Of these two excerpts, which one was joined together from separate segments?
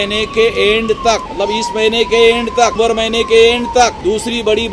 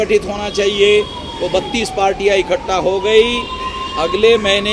first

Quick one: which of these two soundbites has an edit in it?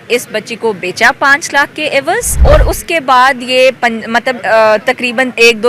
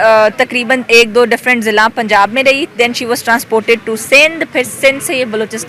first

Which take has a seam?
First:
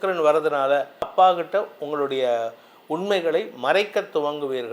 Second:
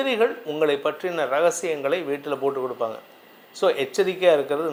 first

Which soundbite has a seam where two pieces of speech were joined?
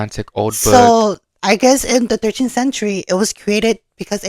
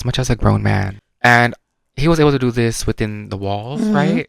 second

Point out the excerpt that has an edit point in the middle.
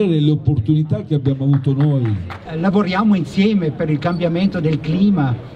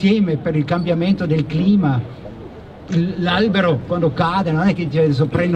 first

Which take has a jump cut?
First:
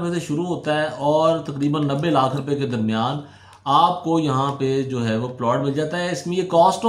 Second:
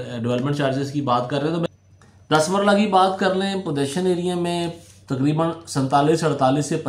second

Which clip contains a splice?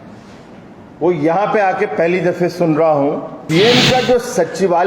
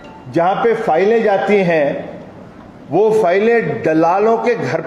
first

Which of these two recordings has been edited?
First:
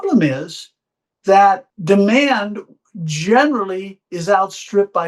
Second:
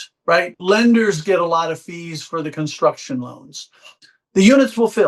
first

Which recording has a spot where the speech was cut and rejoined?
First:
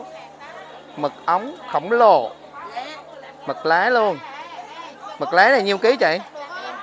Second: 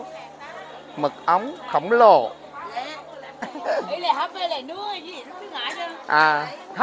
second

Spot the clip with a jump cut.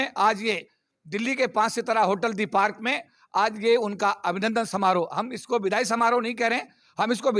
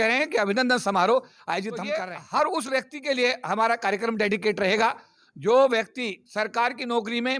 second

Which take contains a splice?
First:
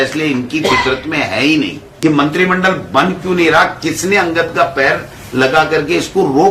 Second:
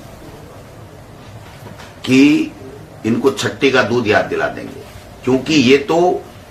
first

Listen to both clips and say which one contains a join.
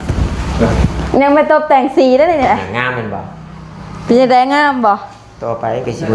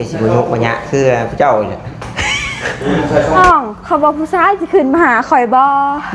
second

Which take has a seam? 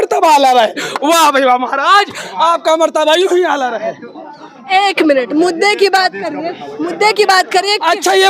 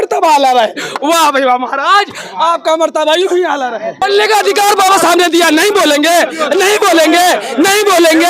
second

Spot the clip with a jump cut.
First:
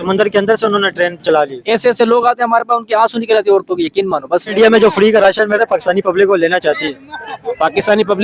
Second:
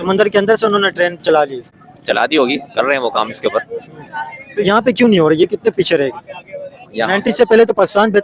first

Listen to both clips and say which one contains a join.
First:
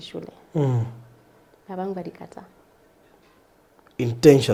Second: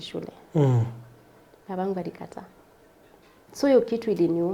second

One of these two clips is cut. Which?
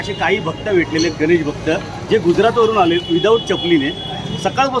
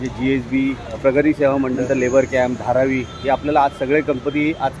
second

